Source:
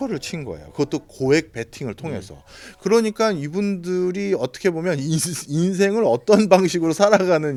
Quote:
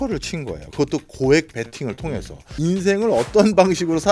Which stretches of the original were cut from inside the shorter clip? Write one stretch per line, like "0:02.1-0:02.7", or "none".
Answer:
0:02.4-0:05.4